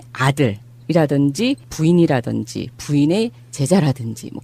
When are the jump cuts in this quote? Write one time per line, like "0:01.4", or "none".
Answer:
none